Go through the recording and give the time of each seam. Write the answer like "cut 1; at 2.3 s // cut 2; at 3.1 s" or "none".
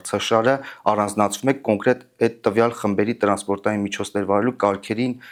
none